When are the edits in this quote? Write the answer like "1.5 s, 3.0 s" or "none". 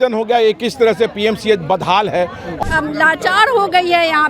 2.5 s